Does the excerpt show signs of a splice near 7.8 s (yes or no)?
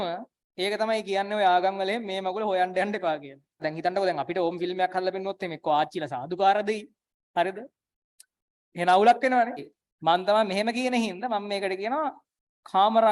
no